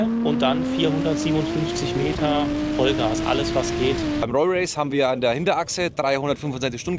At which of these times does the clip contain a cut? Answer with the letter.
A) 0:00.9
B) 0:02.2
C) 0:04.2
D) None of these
C